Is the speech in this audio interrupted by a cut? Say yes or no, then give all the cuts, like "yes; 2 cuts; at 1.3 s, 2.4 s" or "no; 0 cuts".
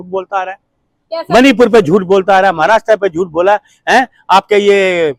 no; 0 cuts